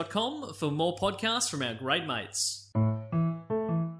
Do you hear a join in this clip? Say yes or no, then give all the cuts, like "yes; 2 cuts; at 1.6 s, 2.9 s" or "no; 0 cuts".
yes; 1 cut; at 2.8 s